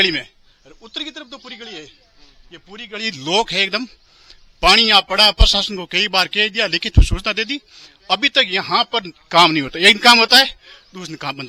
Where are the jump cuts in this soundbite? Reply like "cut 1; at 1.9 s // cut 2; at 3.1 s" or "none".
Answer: none